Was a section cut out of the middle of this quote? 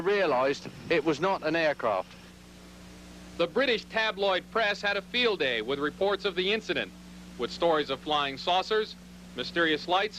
no; 0 cuts

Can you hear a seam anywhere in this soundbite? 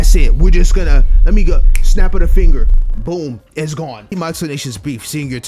yes; 1 cut; at 4.1 s

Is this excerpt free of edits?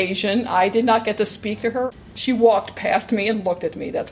no; 1 cut; at 2.1 s

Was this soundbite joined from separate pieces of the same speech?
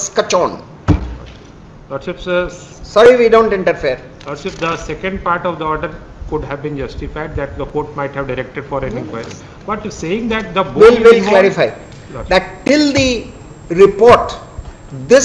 no; 0 cuts

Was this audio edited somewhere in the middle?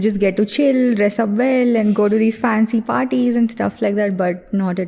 no; 0 cuts

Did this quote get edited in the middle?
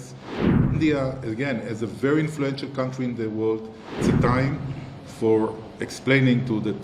yes; 1 cut; at 4.0 s

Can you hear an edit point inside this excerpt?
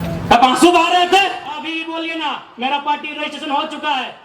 yes; 1 cut; at 1.6 s

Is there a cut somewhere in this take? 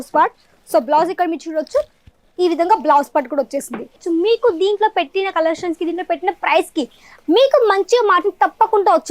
yes; 1 cut; at 4.0 s

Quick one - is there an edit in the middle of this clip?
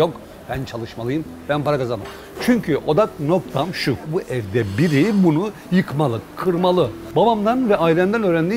no; 0 cuts

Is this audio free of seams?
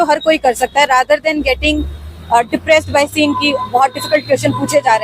yes; 0 cuts

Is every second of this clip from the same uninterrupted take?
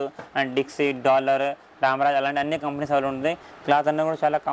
no; 1 cut; at 3.5 s

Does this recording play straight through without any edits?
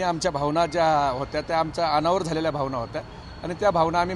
yes; 0 cuts

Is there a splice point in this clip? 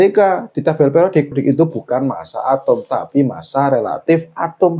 yes; 1 cut; at 1.3 s

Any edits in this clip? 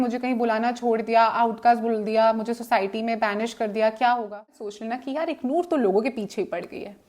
yes; 1 cut; at 4.6 s

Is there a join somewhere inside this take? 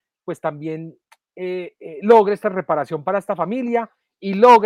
no; 0 cuts

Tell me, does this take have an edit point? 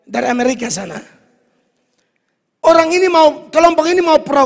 no; 0 cuts

